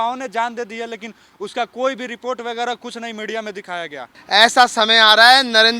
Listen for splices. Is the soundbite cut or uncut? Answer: cut